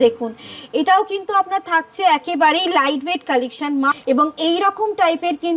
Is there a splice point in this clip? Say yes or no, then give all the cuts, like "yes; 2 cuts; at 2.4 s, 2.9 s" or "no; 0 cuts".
yes; 1 cut; at 4.0 s